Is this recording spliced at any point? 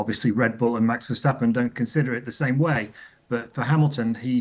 no; 0 cuts

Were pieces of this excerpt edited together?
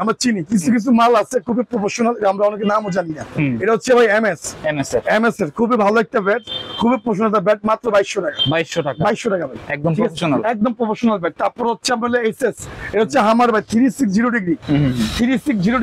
no; 0 cuts

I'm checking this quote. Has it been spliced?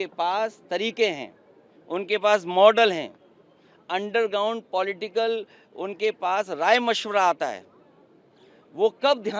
no; 0 cuts

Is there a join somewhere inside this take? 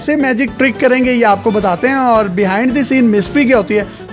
no; 0 cuts

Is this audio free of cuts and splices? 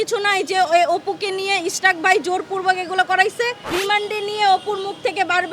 no; 1 cut; at 3.7 s

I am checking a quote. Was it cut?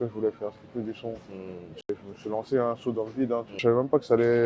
yes; 2 cuts; at 1.8 s, 3.6 s

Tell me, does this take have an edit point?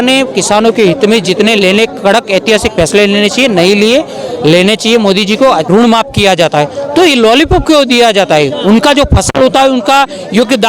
yes; 1 cut; at 5.7 s

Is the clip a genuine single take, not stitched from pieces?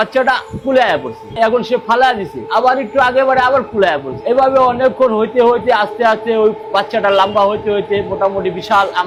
yes; 0 cuts

